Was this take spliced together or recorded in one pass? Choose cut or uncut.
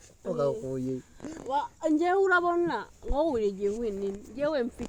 uncut